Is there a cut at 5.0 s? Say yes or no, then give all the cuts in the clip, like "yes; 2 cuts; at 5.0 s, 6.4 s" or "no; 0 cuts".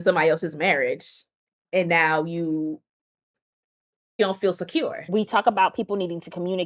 yes; 1 cut; at 5.0 s